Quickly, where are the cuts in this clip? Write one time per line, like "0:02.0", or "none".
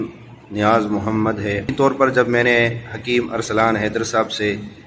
0:01.7